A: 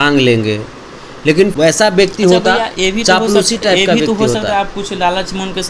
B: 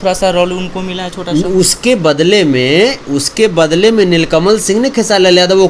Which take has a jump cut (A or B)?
A